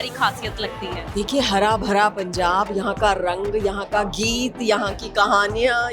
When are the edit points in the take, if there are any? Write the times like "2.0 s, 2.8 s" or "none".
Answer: 1.1 s